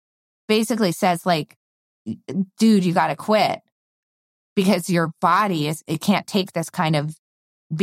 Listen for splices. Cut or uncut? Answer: uncut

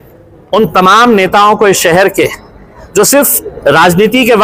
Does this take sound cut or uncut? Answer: uncut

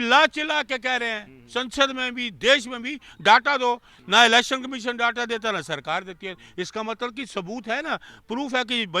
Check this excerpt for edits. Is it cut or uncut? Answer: uncut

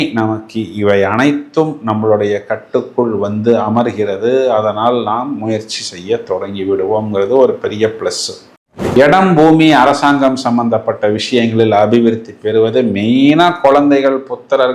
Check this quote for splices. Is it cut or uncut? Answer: cut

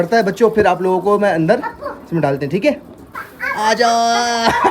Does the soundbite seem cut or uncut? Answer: cut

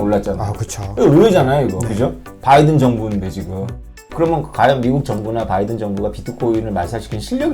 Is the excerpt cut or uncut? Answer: cut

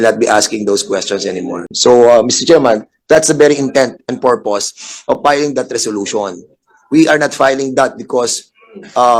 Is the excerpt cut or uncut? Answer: uncut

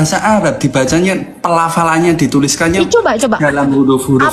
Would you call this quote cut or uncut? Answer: uncut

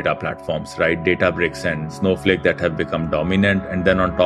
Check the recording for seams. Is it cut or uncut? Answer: cut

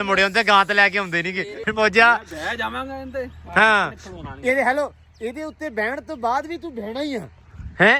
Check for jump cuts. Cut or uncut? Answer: cut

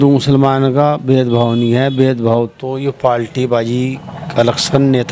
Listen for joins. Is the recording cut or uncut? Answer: uncut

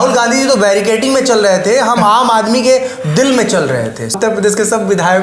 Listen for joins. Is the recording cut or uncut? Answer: cut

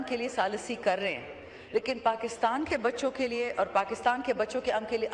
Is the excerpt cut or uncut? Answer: uncut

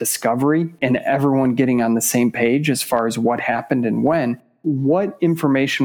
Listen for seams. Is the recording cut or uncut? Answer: cut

